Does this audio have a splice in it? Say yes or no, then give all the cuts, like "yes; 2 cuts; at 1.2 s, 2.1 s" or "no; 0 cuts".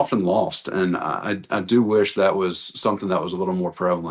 no; 0 cuts